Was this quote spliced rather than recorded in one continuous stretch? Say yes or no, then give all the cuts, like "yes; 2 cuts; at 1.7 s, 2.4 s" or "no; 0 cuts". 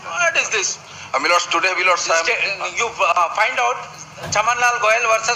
no; 0 cuts